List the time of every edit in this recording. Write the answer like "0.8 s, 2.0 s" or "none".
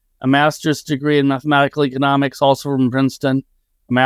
none